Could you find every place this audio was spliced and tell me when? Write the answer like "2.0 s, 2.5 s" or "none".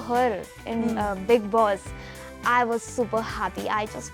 none